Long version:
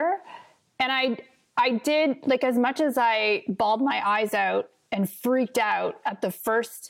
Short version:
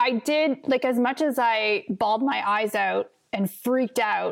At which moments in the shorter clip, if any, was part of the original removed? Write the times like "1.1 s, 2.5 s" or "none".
none